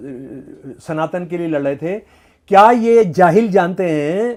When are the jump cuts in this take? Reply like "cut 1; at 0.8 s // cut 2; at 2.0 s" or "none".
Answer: none